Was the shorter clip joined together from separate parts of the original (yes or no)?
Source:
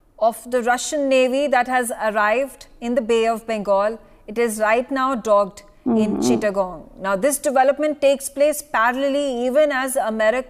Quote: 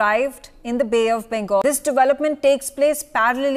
yes